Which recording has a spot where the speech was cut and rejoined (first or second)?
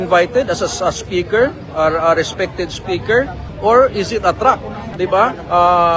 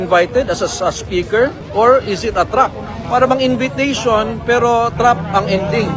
second